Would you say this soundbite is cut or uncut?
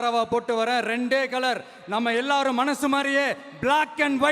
uncut